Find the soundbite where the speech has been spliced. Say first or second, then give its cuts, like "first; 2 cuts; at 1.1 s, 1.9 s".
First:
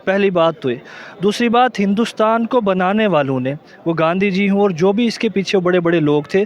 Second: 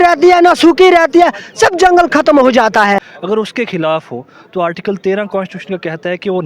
second; 1 cut; at 3.1 s